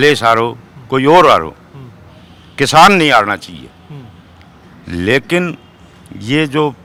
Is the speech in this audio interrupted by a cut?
no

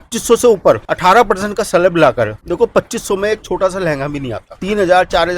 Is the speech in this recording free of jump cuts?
no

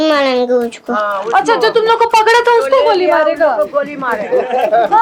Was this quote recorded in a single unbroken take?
yes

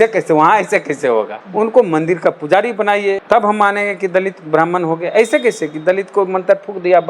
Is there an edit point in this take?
yes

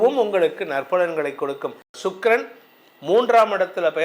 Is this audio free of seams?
no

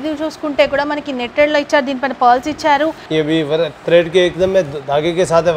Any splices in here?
yes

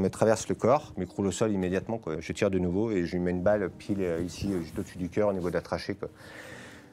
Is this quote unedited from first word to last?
no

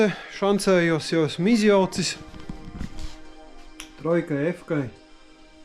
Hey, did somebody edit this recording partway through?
no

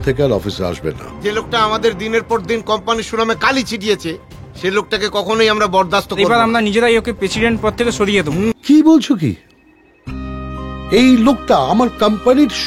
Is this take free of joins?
no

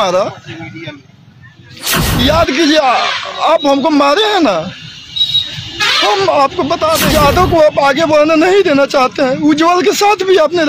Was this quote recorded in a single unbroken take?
no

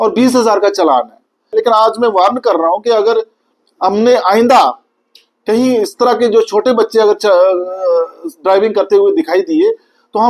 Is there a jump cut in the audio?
yes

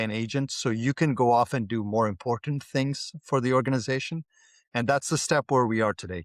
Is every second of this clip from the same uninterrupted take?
yes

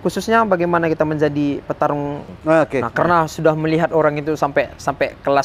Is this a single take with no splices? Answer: no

